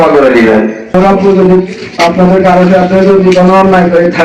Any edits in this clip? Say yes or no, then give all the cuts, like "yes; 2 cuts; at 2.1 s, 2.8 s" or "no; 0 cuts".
yes; 1 cut; at 0.9 s